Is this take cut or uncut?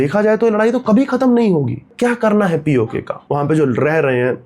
cut